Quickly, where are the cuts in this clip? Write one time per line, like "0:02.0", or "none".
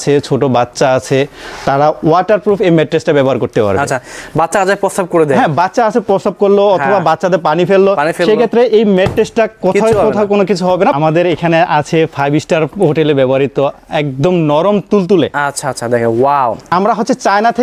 0:11.0
0:16.7